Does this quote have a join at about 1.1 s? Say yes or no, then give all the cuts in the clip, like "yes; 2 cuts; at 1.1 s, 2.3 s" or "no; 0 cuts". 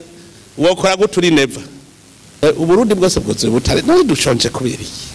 no; 1 cut; at 2.4 s